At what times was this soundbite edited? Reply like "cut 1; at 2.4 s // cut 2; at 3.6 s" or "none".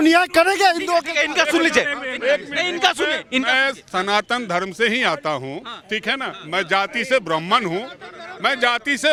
none